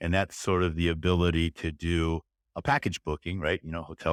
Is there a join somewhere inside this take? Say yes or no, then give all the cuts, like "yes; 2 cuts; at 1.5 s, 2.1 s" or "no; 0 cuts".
no; 0 cuts